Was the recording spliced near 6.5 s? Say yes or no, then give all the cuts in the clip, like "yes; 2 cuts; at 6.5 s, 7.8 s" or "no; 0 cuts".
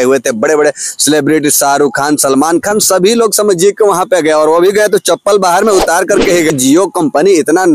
yes; 1 cut; at 6.5 s